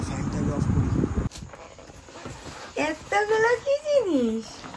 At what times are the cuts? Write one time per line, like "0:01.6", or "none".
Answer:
0:01.3